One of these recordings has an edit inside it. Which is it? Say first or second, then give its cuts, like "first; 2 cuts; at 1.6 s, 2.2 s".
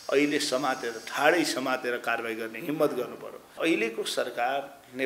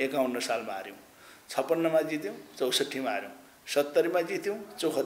first; 1 cut; at 3.6 s